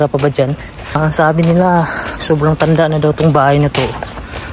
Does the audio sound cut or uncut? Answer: cut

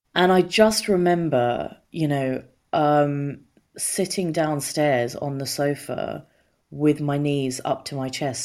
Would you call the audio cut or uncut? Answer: uncut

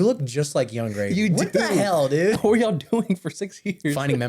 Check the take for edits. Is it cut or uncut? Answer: cut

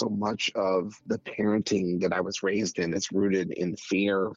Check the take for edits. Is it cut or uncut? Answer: cut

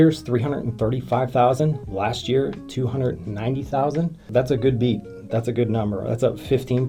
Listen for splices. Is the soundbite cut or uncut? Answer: uncut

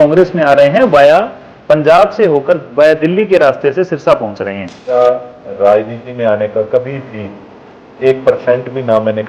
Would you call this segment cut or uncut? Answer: cut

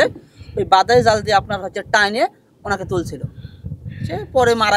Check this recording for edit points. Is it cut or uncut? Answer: uncut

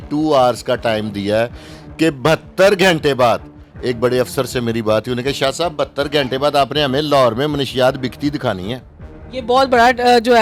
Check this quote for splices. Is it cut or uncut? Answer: uncut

